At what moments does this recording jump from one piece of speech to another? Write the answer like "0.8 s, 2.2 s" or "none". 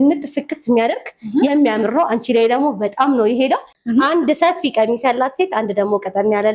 3.7 s